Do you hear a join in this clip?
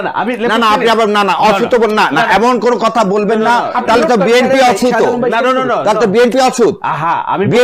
no; 0 cuts

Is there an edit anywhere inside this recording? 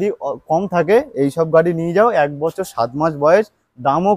no; 0 cuts

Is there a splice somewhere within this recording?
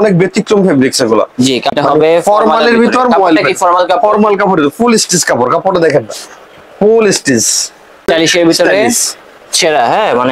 yes; 2 cuts; at 1.7 s, 8.0 s

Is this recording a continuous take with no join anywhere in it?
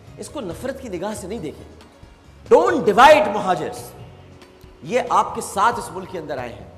yes; 0 cuts

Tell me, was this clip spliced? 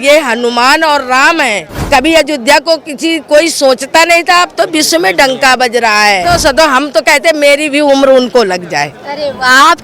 yes; 2 cuts; at 1.7 s, 6.3 s

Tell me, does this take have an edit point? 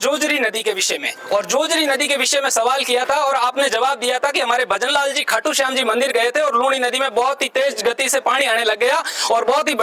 no; 0 cuts

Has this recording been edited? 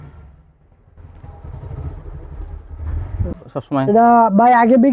yes; 1 cut; at 3.5 s

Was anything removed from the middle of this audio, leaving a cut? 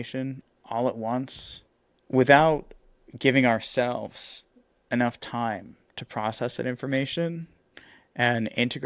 no; 0 cuts

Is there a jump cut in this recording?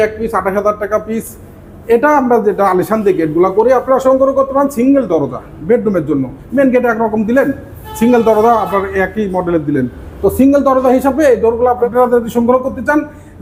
no; 0 cuts

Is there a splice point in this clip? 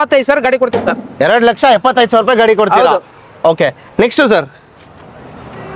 no; 0 cuts

